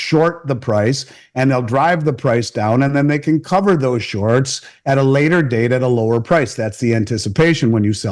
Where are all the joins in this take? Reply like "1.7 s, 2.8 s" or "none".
none